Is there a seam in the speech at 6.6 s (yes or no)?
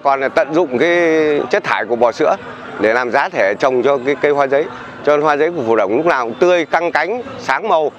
no